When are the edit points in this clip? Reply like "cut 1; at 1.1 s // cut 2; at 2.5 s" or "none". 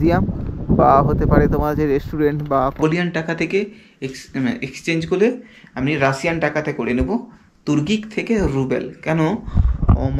cut 1; at 2.8 s